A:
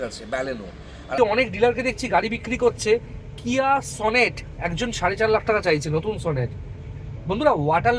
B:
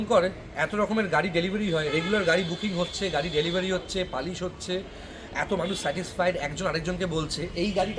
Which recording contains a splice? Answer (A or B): A